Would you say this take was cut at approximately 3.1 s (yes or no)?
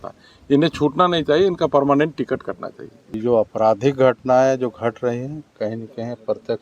yes